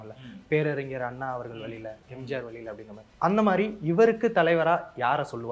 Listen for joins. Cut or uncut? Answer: cut